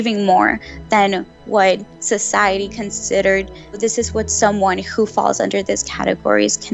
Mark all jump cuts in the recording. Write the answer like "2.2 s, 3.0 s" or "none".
3.8 s

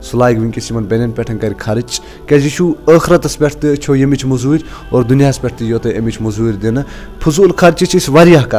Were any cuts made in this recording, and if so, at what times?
none

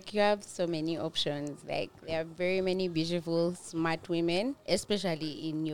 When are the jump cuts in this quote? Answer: 4.6 s

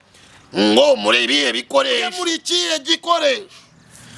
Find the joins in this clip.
2.2 s

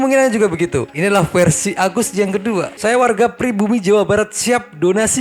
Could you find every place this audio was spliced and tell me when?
2.7 s

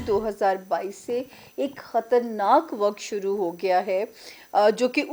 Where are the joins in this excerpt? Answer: none

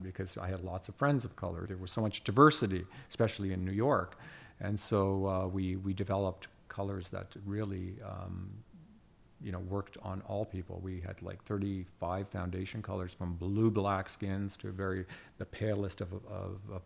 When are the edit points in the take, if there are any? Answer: 1.7 s, 6.7 s

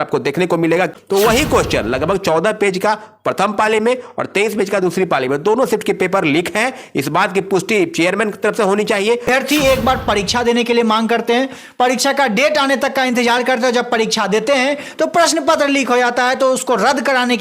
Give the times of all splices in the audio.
0.9 s, 9.3 s

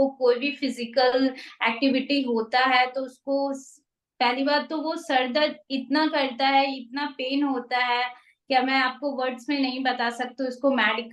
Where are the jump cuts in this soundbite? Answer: none

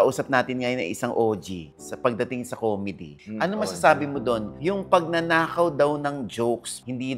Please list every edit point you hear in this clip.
none

